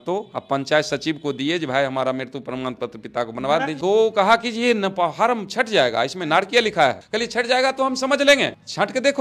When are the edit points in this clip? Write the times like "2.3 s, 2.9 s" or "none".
3.8 s